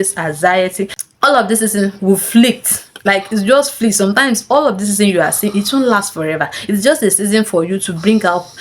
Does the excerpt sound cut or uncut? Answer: cut